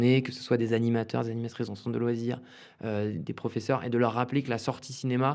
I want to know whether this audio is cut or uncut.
uncut